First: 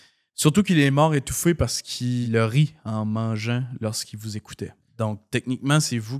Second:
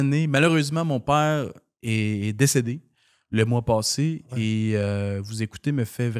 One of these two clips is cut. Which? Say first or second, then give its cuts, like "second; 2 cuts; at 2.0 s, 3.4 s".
first; 2 cuts; at 2.2 s, 4.8 s